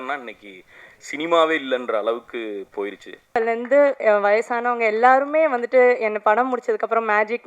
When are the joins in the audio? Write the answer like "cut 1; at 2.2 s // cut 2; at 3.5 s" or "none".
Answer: cut 1; at 3.4 s